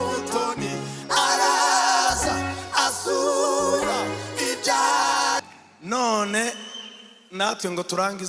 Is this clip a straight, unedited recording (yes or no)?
no